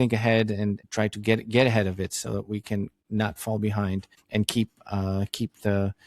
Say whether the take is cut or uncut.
cut